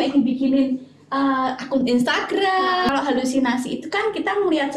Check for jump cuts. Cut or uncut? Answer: cut